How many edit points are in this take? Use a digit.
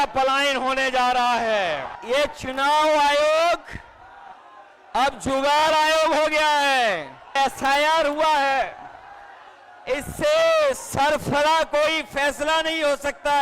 2